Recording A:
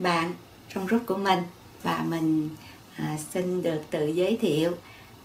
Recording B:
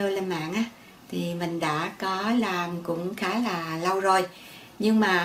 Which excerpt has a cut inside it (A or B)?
A